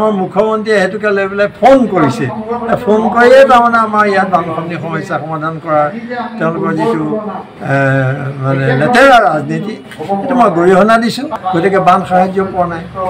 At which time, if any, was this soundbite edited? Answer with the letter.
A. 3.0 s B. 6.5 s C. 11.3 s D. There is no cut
C